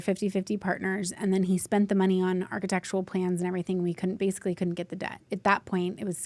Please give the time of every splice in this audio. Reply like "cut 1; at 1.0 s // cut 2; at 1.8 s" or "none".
cut 1; at 5.3 s